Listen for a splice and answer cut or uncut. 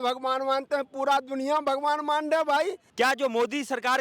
cut